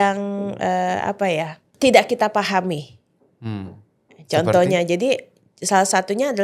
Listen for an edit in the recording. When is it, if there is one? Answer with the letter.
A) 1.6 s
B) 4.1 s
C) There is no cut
A